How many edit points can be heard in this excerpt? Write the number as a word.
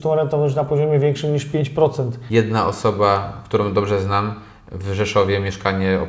one